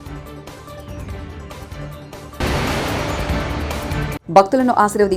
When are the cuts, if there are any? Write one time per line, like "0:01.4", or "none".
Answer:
0:01.3
0:02.2
0:04.2